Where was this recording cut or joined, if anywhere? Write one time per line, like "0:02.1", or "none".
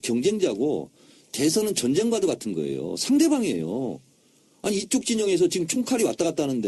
0:02.4